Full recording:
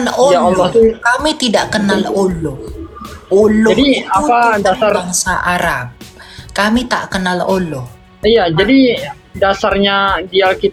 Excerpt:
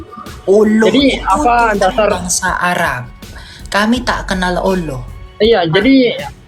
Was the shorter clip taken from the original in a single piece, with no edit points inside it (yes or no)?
yes